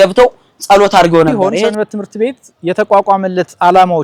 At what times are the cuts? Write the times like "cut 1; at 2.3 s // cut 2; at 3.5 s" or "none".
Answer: cut 1; at 1.3 s